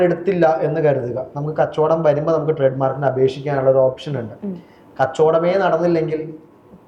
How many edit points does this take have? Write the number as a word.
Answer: zero